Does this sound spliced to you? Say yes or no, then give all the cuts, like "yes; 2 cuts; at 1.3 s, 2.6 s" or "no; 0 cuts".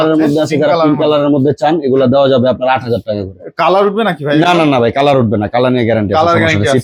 no; 0 cuts